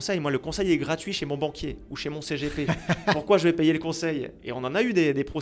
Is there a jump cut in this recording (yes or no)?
no